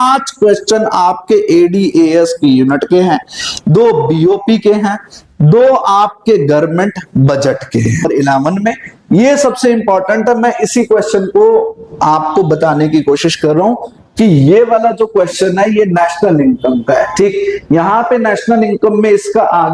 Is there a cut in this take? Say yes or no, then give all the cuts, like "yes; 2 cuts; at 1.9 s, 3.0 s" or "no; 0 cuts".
yes; 1 cut; at 8.1 s